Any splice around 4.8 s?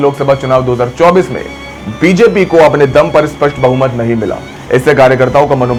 no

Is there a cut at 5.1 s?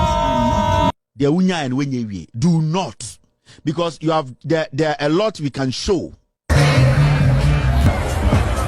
no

